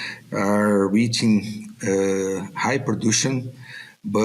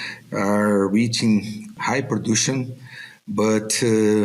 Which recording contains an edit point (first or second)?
second